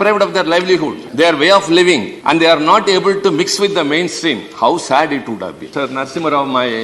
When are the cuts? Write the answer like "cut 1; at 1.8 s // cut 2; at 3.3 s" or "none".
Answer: cut 1; at 1.0 s // cut 2; at 2.1 s // cut 3; at 5.7 s